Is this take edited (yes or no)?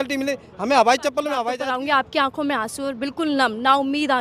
yes